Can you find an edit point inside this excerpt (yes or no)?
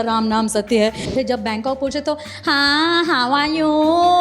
yes